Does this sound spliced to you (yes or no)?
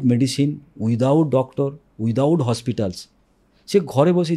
no